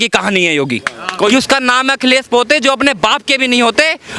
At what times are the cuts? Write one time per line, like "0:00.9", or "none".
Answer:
0:01.3